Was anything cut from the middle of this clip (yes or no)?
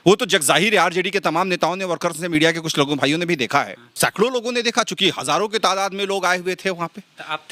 yes